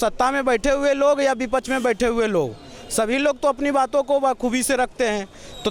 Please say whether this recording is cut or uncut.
uncut